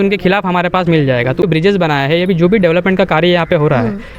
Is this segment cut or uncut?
cut